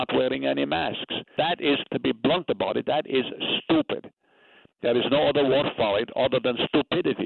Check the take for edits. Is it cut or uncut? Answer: cut